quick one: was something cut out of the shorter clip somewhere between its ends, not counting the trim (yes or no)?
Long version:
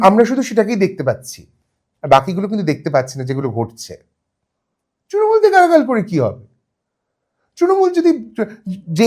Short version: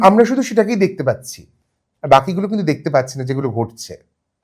no